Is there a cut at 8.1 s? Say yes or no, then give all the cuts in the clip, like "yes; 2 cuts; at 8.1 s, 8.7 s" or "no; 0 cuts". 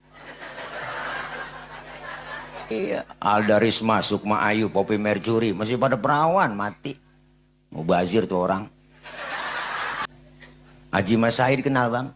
no; 2 cuts; at 2.7 s, 10.1 s